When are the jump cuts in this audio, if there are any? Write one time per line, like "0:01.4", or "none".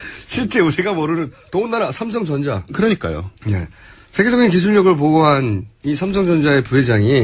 none